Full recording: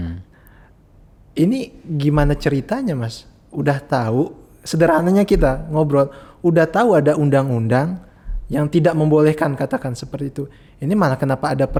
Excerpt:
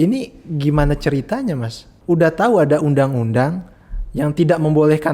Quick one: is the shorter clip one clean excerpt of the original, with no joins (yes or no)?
no